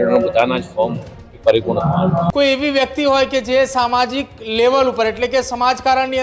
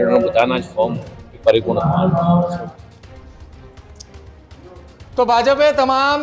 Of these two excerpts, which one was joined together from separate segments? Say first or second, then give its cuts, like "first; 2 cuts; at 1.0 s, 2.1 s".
first; 1 cut; at 2.3 s